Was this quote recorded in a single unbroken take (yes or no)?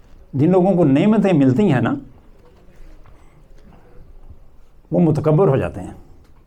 yes